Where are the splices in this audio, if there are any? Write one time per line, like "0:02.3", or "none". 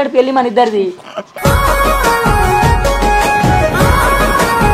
none